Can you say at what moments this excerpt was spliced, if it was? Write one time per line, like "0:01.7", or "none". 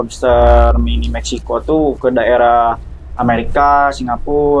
none